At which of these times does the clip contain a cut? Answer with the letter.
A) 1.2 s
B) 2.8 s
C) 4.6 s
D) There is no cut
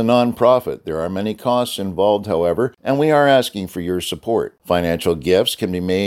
B